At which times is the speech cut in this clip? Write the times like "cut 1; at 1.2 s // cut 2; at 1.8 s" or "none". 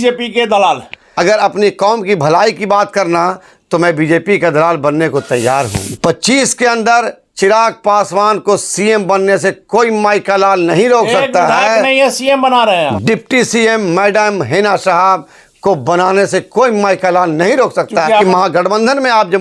cut 1; at 1.0 s // cut 2; at 5.8 s // cut 3; at 12.9 s // cut 4; at 18.2 s